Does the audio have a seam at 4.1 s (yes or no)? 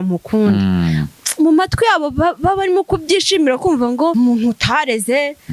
yes